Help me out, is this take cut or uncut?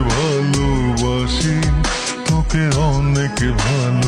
uncut